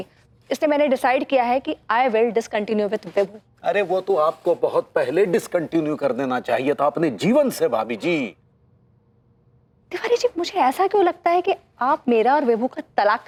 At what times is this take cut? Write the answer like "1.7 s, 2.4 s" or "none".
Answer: none